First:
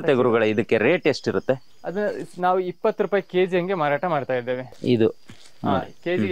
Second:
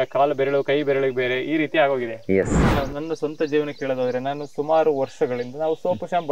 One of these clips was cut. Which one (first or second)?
second